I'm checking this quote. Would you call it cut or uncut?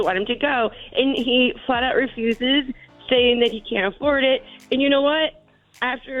uncut